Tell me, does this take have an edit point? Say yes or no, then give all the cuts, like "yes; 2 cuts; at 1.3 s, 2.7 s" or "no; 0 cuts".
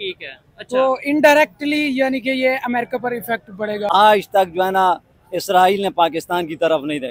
yes; 1 cut; at 3.8 s